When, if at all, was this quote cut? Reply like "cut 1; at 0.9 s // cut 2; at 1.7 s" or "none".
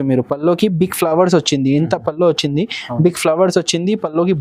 none